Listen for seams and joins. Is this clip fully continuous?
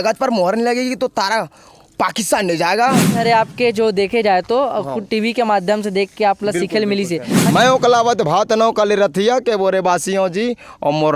no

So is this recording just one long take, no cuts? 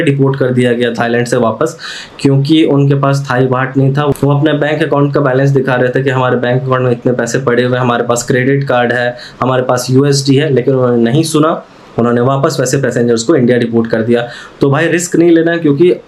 yes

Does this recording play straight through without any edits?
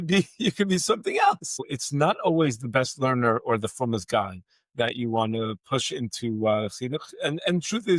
no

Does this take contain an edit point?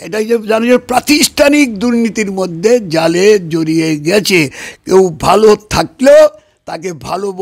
no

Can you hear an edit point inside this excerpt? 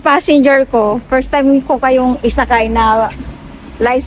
no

